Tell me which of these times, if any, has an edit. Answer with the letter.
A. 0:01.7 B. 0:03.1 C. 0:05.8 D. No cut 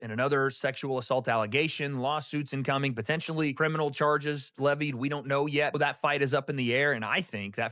C